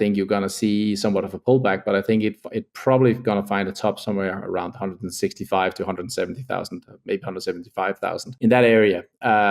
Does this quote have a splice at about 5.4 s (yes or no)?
no